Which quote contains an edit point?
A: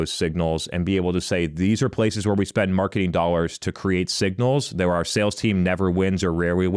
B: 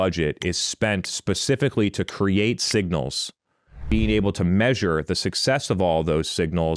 B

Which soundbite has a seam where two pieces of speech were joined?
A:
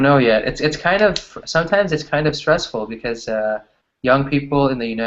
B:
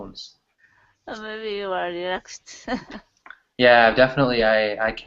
A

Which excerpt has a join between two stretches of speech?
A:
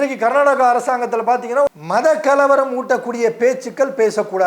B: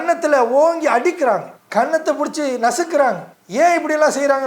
A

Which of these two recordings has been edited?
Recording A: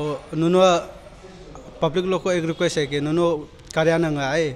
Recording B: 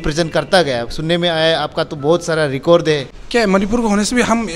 B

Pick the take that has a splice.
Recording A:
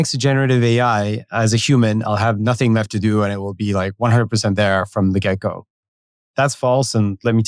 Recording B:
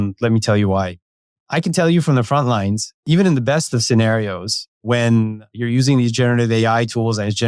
B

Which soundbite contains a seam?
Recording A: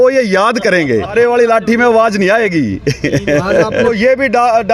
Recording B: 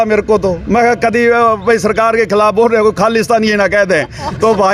A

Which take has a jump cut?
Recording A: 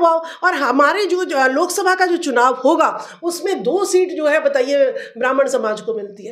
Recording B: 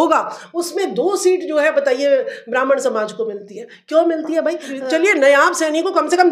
B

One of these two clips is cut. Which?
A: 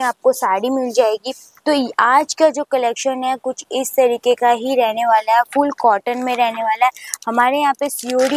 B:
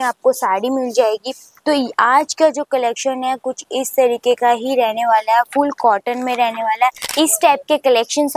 B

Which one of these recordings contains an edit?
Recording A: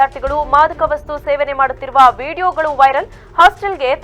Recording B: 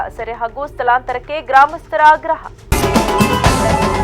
B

